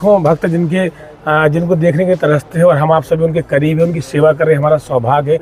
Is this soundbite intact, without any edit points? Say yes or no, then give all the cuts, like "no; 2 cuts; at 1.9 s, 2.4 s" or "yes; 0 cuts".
yes; 0 cuts